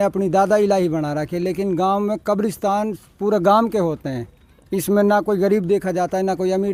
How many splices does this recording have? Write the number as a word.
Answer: zero